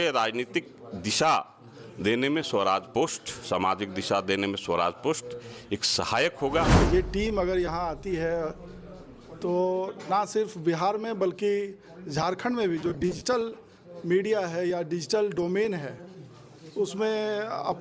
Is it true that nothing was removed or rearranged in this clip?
no; 1 cut; at 6.7 s

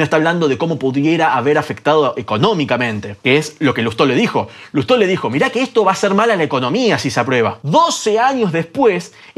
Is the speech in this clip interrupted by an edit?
yes; 1 cut; at 7.6 s

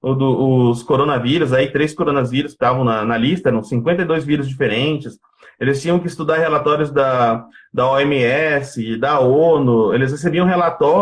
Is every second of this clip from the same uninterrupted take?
yes; 0 cuts

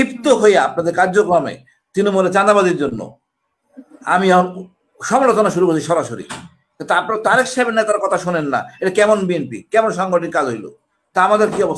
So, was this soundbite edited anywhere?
no; 0 cuts

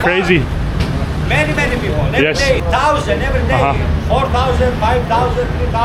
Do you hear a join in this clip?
yes; 1 cut; at 2.6 s

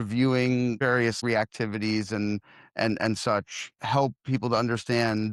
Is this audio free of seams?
no; 1 cut; at 0.9 s

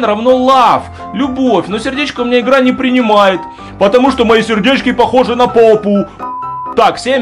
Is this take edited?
yes; 1 cut; at 6.2 s

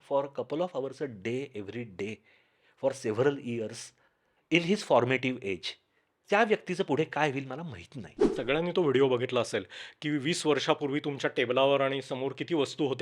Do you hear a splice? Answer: yes; 2 cuts; at 6.2 s, 8.3 s

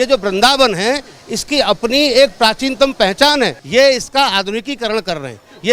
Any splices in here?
yes; 1 cut; at 3.6 s

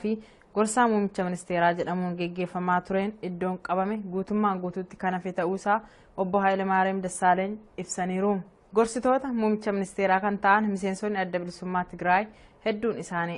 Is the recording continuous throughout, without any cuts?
yes; 0 cuts

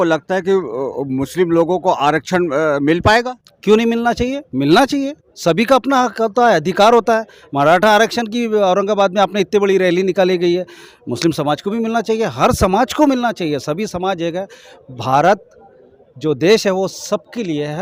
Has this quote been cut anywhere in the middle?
no; 0 cuts

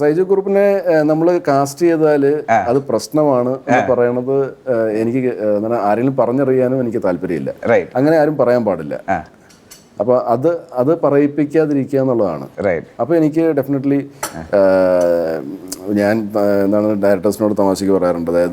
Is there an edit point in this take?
no; 0 cuts

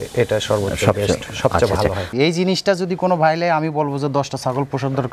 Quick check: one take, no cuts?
no; 1 cut; at 2.1 s

